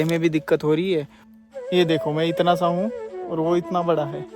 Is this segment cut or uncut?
cut